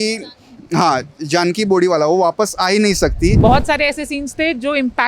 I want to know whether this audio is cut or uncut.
cut